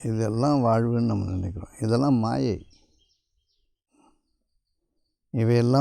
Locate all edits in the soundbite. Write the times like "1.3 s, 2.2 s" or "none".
4.2 s